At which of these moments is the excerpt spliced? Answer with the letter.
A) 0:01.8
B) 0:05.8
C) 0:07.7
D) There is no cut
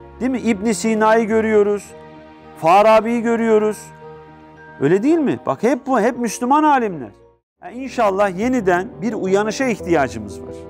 C